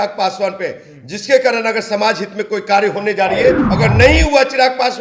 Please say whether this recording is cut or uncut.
cut